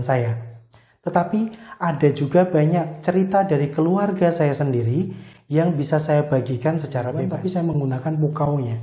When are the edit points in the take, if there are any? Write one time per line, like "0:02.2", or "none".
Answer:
0:07.2